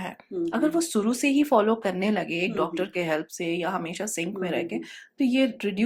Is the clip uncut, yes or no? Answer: yes